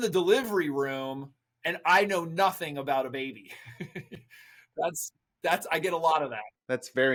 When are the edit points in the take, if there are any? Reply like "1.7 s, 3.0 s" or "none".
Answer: none